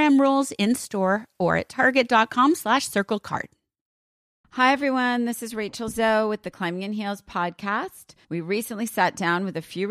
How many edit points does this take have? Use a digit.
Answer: 1